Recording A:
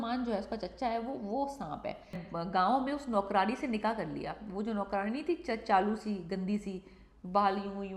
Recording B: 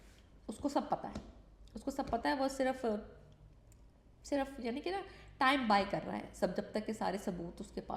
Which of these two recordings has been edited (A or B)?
A